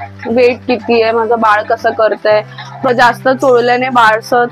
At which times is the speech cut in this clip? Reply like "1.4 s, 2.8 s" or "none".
2.9 s